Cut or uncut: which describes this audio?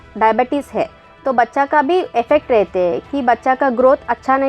uncut